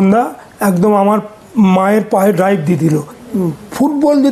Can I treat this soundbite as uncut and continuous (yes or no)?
no